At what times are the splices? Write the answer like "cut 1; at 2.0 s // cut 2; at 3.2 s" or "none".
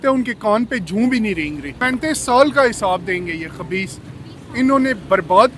cut 1; at 1.8 s